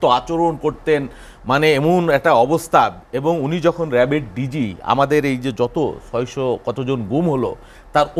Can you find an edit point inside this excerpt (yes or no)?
no